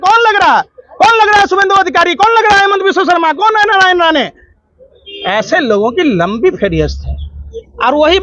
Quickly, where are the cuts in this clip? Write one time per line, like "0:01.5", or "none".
none

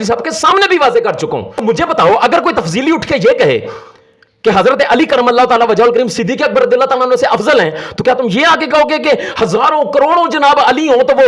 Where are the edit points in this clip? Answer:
0:01.5

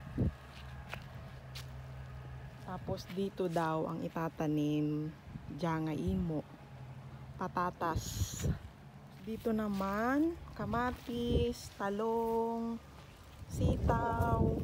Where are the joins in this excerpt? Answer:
0:09.2

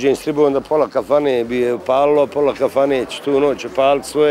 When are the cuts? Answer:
none

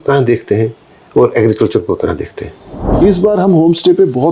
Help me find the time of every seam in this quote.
0:02.8

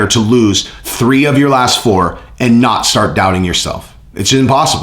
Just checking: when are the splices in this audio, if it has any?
none

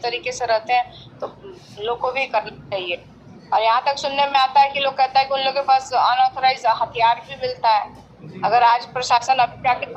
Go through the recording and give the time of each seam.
none

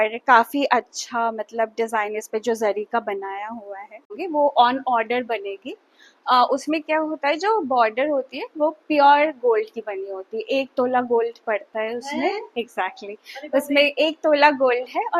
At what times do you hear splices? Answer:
0:04.2

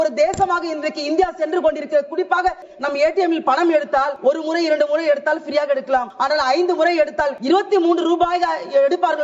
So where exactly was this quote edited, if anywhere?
0:02.7
0:04.1
0:06.1
0:07.4

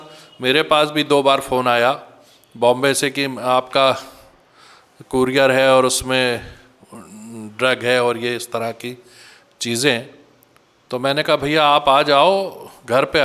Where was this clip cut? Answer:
none

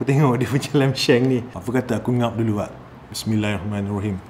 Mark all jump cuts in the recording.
0:01.6

